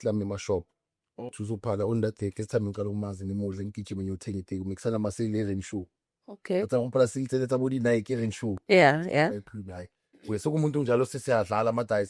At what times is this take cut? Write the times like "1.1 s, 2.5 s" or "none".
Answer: 1.2 s